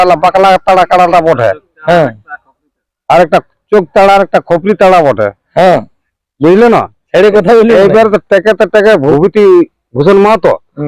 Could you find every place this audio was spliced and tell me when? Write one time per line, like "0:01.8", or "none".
0:09.1